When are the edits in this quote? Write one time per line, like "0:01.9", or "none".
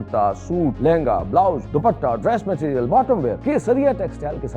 0:00.8
0:01.6
0:03.4